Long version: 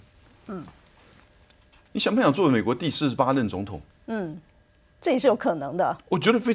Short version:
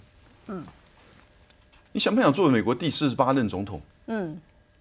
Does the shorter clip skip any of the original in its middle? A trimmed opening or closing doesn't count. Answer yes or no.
no